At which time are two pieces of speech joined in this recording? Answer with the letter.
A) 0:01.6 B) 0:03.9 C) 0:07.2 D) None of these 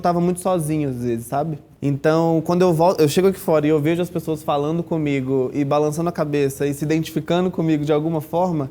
A